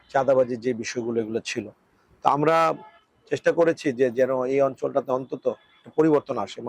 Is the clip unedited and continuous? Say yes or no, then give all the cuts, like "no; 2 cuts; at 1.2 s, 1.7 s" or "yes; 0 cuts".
yes; 0 cuts